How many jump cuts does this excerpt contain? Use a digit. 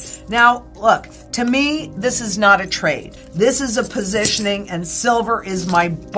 0